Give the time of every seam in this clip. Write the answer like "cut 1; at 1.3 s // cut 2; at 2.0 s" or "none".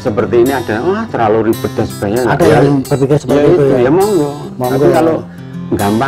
none